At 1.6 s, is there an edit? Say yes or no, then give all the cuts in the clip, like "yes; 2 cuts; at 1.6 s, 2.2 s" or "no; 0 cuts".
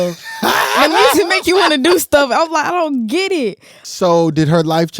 no; 1 cut; at 3.8 s